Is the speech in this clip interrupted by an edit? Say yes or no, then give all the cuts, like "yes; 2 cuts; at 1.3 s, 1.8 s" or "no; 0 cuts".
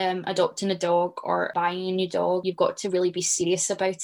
yes; 2 cuts; at 1.5 s, 2.4 s